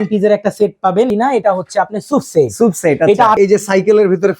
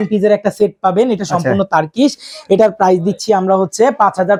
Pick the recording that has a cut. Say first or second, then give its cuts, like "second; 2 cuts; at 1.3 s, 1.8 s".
first; 2 cuts; at 1.1 s, 3.4 s